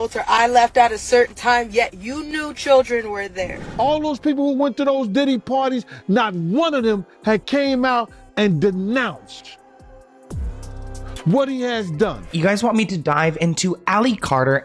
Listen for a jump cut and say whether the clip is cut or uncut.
cut